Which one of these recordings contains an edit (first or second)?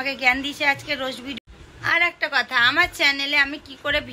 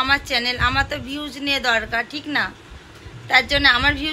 first